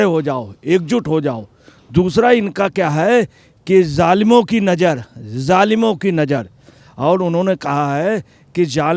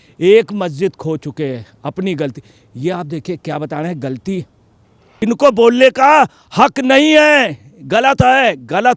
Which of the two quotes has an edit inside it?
second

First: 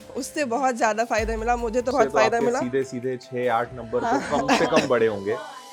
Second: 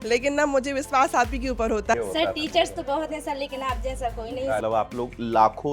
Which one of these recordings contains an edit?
second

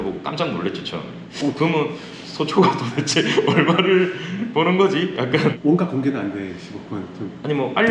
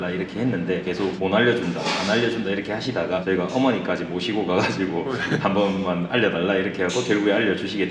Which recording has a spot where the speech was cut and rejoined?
first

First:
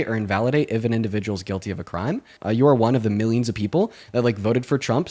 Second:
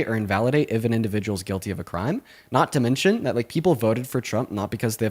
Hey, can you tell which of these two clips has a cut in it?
first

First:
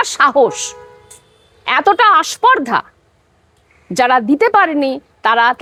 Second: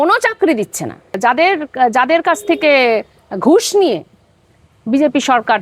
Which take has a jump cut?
second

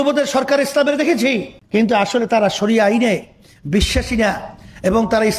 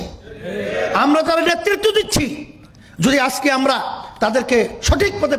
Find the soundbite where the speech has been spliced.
first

